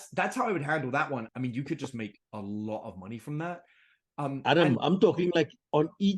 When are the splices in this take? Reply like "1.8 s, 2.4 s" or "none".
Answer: 1.3 s